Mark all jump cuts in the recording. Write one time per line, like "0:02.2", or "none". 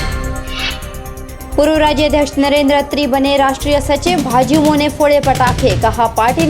0:01.1